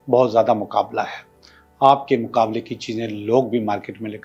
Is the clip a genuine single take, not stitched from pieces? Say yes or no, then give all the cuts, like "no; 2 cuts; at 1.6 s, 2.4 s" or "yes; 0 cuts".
yes; 0 cuts